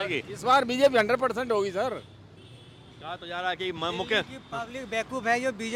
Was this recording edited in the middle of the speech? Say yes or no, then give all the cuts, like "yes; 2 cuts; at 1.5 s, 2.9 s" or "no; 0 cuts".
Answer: no; 0 cuts